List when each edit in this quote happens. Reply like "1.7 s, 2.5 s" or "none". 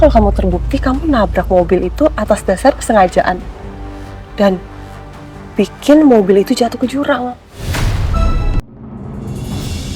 8.6 s